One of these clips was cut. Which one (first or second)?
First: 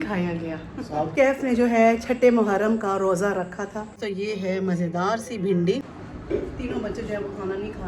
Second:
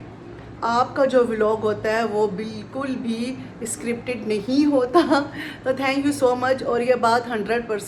first